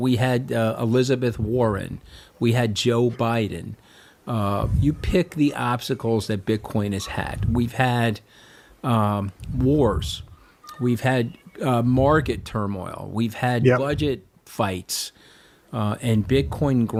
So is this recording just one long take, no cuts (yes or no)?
yes